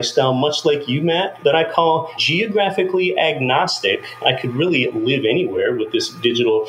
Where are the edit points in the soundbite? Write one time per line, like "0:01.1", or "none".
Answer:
0:01.3
0:02.2